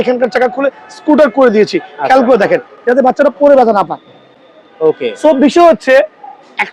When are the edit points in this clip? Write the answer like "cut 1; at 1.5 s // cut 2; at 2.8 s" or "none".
none